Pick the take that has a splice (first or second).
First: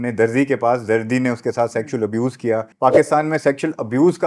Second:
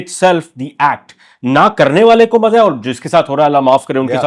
first